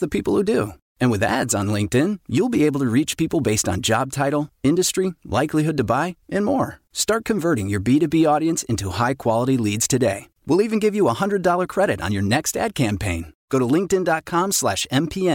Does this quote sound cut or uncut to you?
uncut